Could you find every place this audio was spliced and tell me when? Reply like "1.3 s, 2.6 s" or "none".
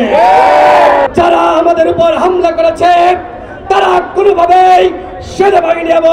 1.1 s